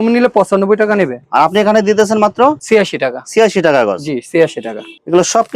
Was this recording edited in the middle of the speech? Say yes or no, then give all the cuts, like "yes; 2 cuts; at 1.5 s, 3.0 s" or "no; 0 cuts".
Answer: no; 0 cuts